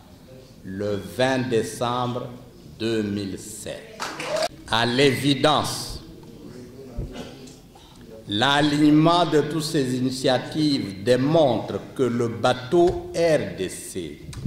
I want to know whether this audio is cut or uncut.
cut